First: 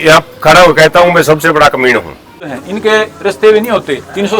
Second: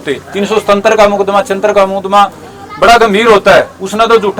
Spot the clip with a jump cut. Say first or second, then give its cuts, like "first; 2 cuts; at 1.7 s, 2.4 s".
first; 1 cut; at 2.5 s